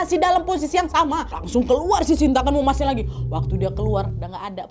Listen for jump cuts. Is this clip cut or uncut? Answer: cut